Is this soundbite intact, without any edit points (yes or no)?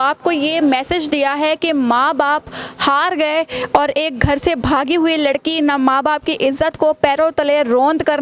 yes